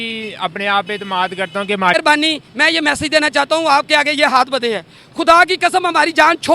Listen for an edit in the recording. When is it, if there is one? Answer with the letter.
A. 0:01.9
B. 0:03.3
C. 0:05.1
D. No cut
A